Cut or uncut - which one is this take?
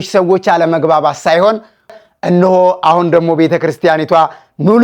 cut